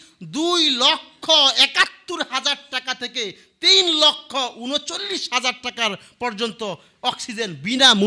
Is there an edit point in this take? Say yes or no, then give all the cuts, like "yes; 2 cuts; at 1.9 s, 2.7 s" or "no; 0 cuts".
no; 0 cuts